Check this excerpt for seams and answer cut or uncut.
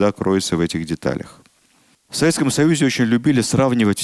uncut